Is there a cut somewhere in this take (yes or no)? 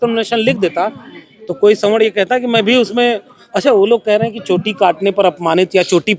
no